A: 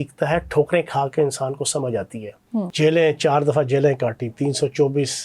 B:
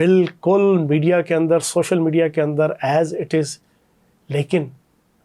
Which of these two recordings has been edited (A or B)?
A